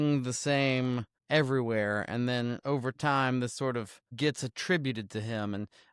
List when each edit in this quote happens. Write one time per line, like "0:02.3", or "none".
0:01.1
0:04.0

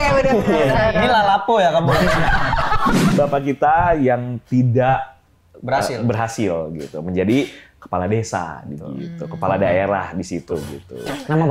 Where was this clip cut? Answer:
0:03.1

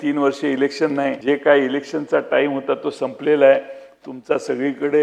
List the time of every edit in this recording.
0:01.2

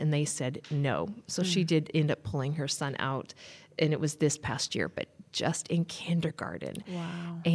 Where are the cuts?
none

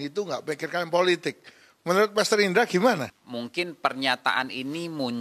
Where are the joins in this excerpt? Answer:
0:03.2

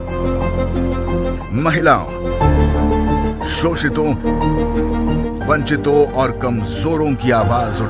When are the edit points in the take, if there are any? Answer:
none

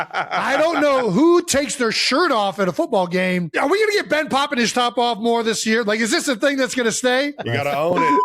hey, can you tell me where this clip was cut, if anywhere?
0:03.5
0:07.3

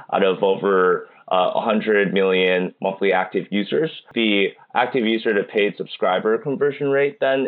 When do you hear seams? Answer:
0:04.0

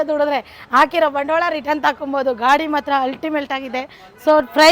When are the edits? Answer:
none

